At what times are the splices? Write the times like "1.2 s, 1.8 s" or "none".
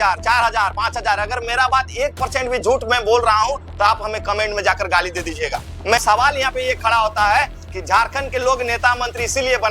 6.0 s